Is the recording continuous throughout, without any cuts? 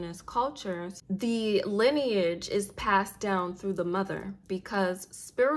no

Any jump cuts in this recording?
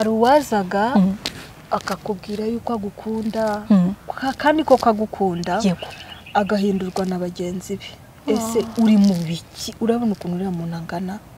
no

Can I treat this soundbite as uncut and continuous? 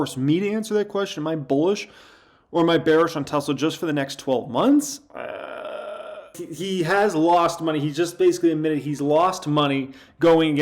no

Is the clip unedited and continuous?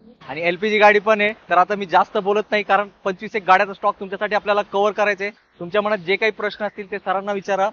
yes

